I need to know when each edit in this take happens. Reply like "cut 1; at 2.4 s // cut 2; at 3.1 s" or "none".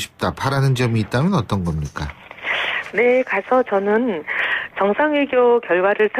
cut 1; at 4.6 s